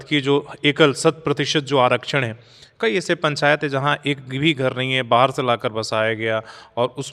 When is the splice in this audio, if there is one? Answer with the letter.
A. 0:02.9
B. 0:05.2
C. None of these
C